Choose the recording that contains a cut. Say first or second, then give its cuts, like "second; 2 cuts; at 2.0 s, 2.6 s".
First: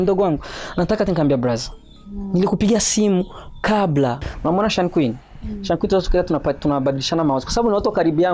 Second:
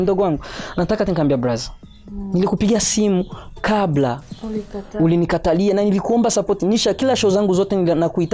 first; 1 cut; at 4.3 s